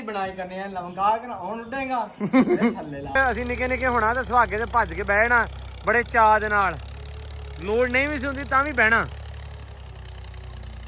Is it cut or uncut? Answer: cut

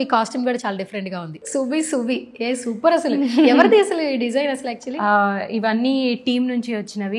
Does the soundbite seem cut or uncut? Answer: cut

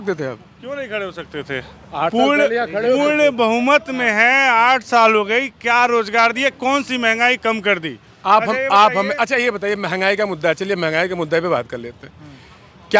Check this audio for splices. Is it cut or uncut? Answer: uncut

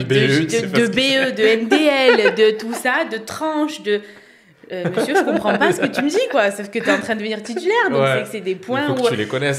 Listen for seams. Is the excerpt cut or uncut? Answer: uncut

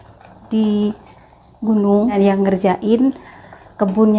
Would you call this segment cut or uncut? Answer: cut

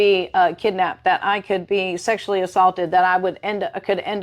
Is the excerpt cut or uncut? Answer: uncut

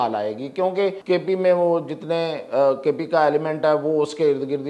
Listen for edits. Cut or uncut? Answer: cut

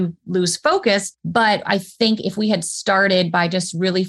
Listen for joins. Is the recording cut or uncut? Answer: cut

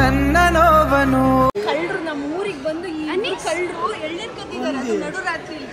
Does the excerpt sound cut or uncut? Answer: cut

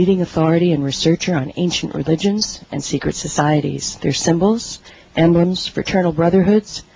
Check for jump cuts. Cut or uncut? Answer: cut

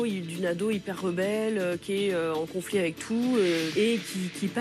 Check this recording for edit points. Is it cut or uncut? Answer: cut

